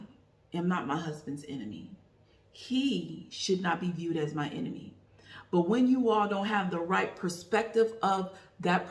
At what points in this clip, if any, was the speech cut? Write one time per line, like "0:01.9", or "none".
none